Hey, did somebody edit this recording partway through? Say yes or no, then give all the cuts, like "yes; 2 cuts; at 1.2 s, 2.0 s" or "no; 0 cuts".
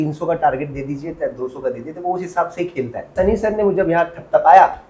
yes; 1 cut; at 3.1 s